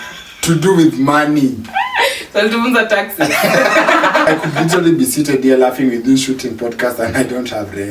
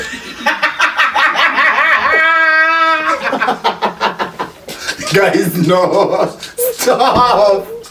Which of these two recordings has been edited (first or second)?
first